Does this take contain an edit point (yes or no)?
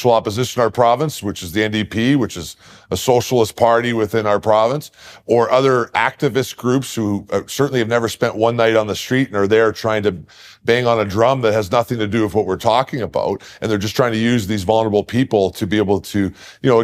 no